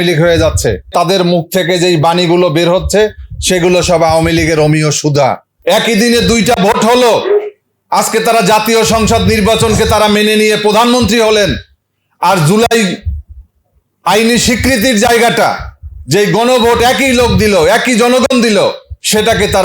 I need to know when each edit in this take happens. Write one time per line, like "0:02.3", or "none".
0:00.9
0:05.5